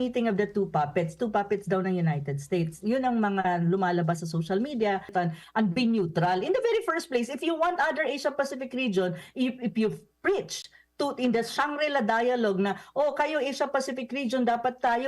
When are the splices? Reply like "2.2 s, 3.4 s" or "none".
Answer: 5.1 s